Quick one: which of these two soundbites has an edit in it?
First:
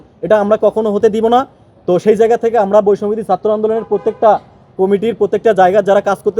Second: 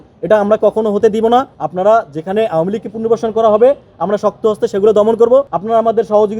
second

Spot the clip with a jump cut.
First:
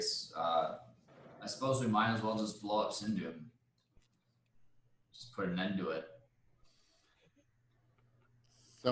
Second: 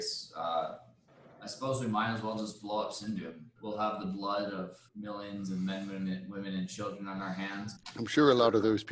second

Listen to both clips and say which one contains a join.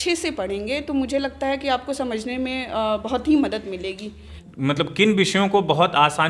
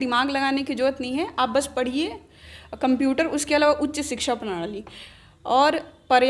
first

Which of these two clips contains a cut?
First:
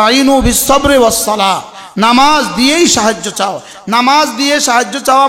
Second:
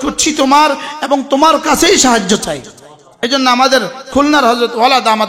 second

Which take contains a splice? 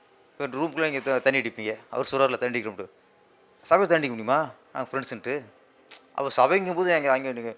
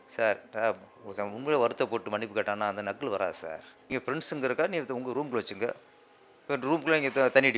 second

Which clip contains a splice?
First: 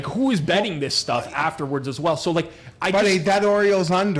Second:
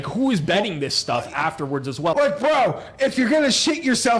second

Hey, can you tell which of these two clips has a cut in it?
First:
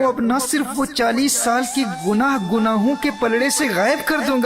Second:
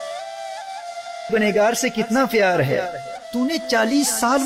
first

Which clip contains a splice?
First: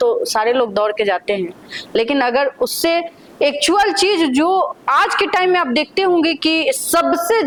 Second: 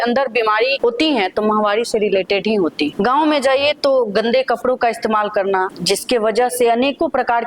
second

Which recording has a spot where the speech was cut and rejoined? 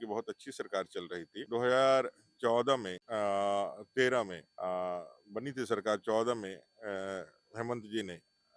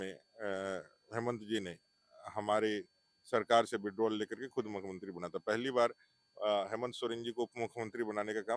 first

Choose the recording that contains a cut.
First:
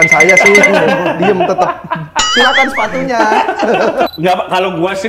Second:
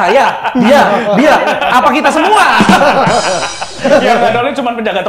first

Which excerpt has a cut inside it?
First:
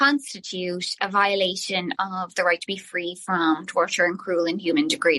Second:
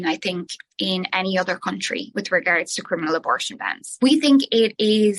second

